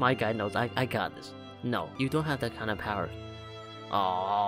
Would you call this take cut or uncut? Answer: cut